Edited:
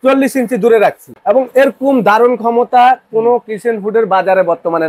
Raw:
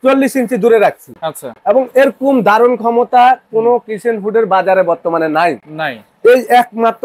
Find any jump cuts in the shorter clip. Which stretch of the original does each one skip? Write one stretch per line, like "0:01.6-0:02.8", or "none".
0:01.1-0:01.5